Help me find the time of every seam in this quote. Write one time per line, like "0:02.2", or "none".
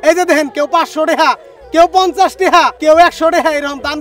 0:02.7